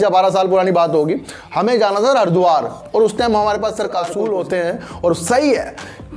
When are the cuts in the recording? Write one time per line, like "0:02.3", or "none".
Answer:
0:04.0